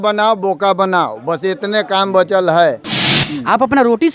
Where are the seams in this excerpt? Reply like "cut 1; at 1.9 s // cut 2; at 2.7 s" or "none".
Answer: cut 1; at 3.2 s